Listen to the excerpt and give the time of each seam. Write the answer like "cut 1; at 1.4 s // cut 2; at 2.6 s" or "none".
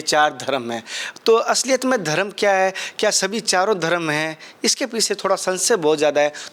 none